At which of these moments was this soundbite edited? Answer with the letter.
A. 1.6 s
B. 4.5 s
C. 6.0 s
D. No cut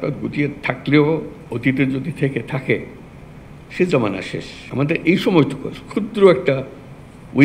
B